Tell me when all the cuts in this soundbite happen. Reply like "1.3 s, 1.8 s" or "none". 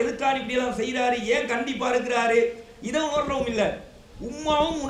none